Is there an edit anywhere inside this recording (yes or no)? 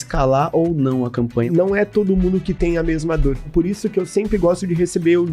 yes